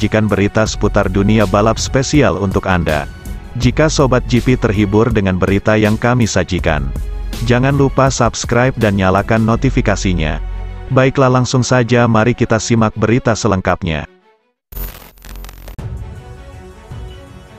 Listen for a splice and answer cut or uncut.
cut